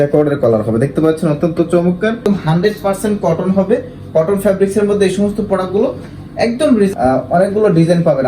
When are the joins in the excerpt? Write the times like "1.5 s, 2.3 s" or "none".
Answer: 2.3 s, 6.9 s